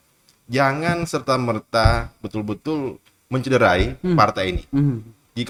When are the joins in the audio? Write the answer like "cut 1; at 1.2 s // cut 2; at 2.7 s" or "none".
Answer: none